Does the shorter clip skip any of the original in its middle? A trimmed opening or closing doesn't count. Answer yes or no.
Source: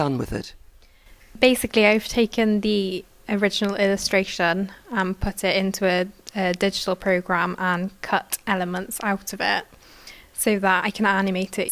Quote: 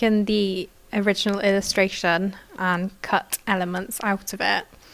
yes